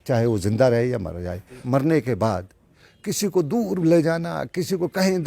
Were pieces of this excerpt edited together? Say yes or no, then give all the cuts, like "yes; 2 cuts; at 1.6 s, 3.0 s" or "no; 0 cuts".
yes; 1 cut; at 1.6 s